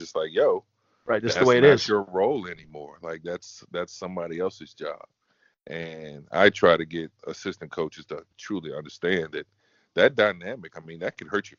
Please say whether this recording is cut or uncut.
uncut